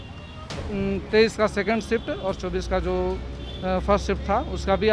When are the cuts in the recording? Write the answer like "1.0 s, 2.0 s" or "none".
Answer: none